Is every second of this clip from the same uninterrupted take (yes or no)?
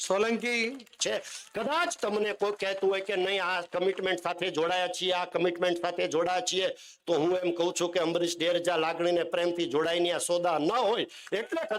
no